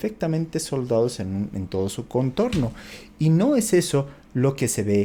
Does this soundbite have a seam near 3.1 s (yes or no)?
no